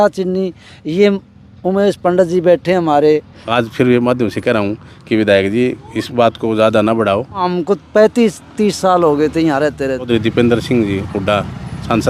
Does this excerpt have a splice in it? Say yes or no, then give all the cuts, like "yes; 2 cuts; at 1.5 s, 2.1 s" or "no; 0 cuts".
yes; 3 cuts; at 3.4 s, 7.4 s, 10.1 s